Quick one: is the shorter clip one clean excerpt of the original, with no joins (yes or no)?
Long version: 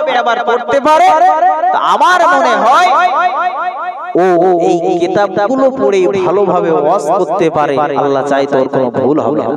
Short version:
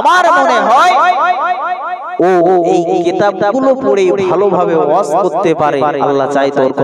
yes